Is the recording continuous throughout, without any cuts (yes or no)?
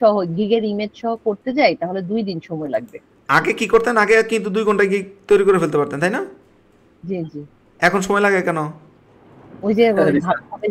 yes